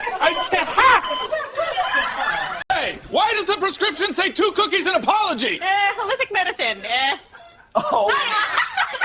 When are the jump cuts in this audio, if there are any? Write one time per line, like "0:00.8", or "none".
0:02.6

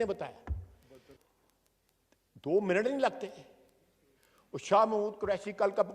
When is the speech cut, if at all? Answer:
0:01.2

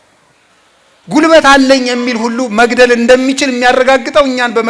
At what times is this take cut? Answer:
none

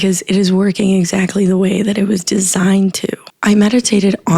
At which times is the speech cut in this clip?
0:03.3

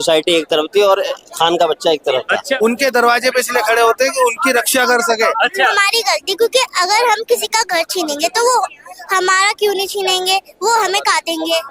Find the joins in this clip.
0:02.5
0:05.8

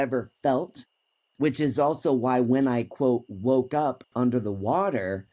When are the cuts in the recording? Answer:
none

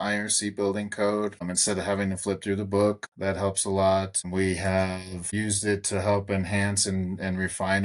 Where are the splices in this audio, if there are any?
0:01.5
0:03.1
0:04.3
0:05.3

